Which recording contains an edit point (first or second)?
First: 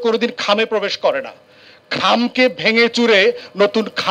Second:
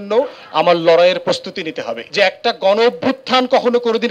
second